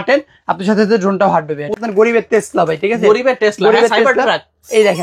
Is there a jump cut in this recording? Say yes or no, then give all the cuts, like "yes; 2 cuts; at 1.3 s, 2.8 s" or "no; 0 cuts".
yes; 1 cut; at 1.8 s